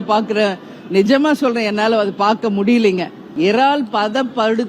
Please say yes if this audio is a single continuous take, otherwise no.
no